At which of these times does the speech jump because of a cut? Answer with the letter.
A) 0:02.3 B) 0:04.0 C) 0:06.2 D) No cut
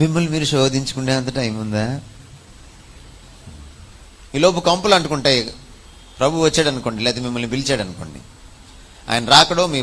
B